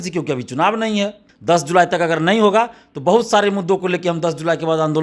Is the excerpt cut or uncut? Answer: cut